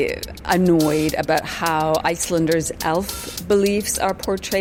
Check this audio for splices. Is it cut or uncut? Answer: uncut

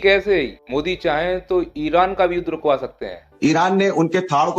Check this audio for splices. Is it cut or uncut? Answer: cut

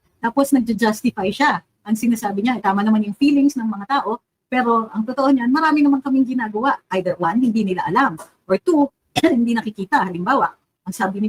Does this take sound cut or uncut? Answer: uncut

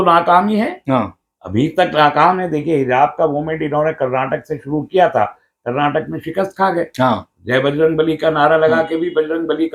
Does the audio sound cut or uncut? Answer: uncut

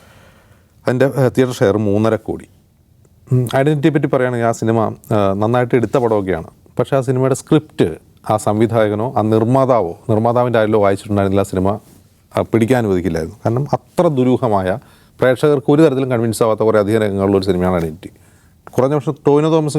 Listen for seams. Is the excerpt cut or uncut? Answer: uncut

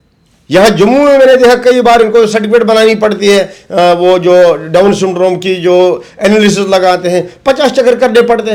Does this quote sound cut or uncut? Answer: uncut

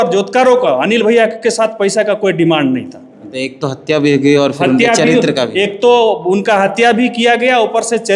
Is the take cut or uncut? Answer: uncut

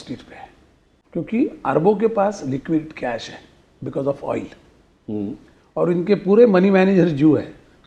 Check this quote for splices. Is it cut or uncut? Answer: cut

